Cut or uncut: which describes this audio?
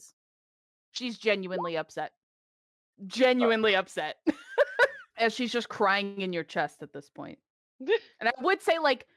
cut